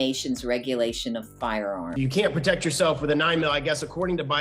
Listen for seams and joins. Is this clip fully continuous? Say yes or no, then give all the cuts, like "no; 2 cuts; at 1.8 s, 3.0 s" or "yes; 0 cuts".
no; 1 cut; at 1.9 s